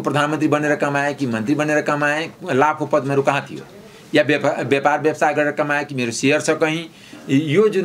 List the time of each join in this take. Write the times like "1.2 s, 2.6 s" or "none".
none

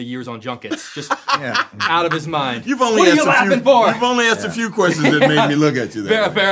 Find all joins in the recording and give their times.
none

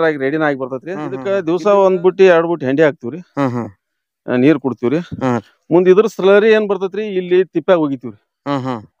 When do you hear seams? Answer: 1.3 s

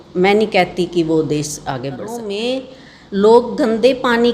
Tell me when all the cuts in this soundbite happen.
2.4 s

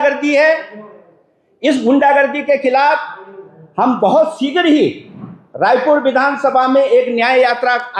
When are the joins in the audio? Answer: none

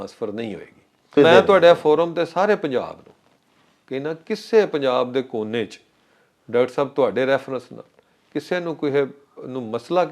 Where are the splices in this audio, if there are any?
1.2 s

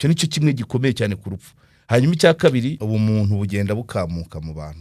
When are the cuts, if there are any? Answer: 2.8 s

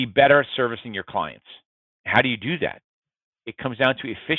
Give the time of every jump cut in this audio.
2.0 s

